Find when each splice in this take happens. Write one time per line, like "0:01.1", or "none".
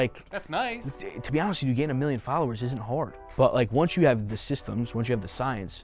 0:03.2